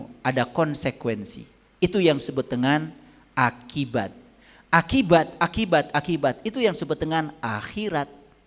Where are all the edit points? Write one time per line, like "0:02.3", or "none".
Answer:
none